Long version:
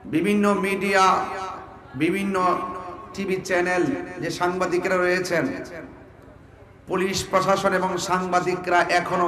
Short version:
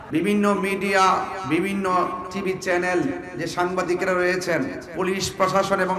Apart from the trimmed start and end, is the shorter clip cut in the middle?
yes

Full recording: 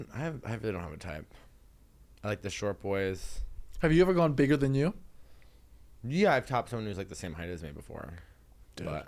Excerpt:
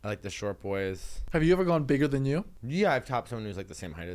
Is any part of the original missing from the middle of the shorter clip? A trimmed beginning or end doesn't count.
yes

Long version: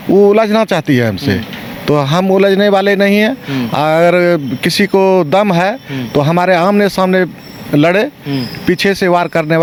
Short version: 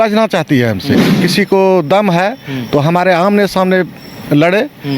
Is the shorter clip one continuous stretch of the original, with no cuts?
no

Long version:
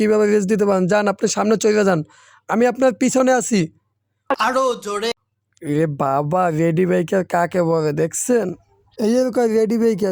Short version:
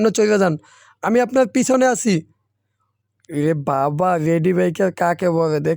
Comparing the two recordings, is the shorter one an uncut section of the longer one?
no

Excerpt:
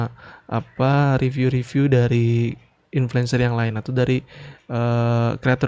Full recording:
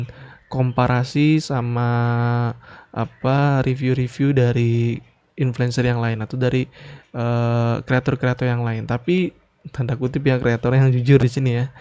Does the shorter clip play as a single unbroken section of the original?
yes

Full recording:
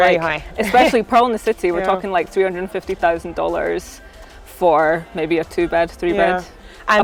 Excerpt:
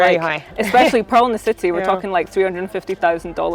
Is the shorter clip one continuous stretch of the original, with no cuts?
yes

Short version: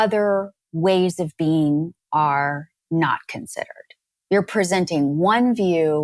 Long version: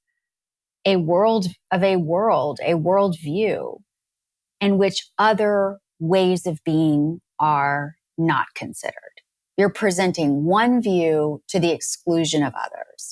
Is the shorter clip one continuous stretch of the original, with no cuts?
yes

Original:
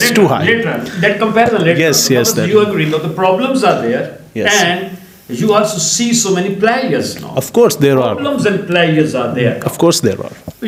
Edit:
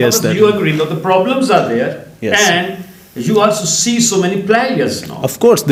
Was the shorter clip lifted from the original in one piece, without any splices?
yes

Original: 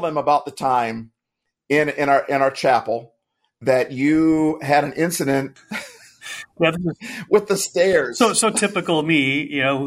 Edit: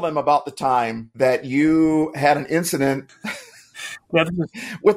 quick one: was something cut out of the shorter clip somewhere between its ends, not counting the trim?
yes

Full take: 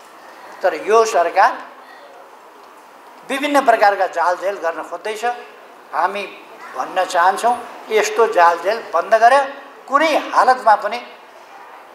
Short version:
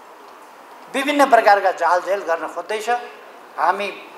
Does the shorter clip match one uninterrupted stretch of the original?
yes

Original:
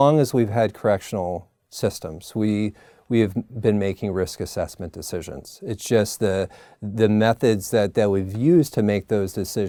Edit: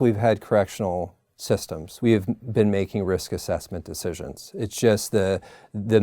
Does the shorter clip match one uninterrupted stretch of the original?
no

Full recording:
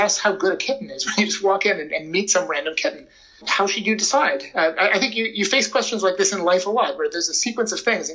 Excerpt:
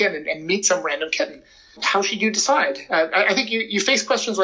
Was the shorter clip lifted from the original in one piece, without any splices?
yes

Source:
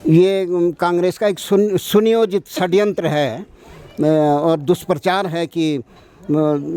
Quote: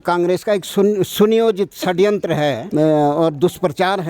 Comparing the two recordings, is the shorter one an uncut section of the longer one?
no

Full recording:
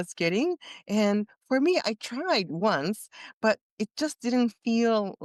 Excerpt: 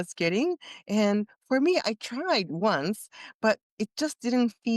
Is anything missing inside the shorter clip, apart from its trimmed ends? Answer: no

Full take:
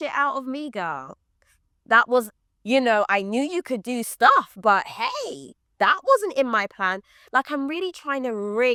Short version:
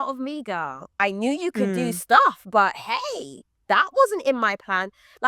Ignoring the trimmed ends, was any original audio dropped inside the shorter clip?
yes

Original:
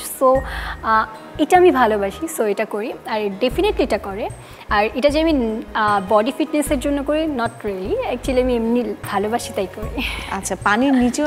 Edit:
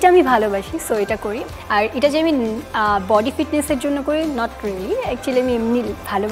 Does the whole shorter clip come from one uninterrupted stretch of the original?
no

